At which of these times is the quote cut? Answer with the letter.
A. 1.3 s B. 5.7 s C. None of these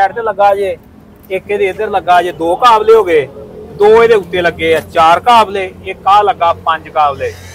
C